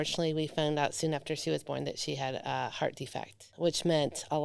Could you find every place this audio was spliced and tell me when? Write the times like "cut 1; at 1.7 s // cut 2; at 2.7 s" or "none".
none